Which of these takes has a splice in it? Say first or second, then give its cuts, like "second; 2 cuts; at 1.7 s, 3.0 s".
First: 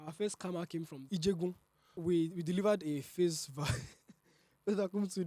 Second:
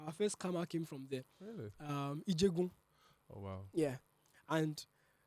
first; 2 cuts; at 1.0 s, 2.0 s